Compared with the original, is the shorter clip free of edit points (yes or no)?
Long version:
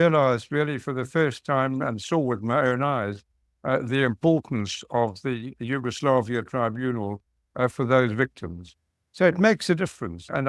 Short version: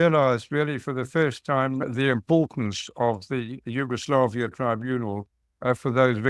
no